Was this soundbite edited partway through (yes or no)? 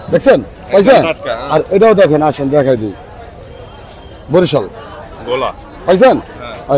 no